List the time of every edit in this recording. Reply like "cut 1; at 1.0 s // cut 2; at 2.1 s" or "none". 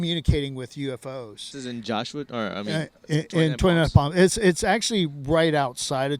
cut 1; at 1.4 s